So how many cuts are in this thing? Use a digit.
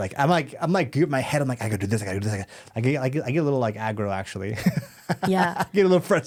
0